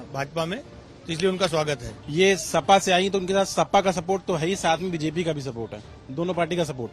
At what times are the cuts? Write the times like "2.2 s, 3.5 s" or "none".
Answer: 1.9 s